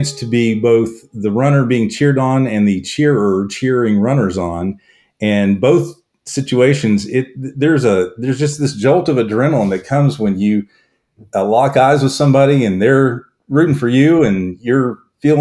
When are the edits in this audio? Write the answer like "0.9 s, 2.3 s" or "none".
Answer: none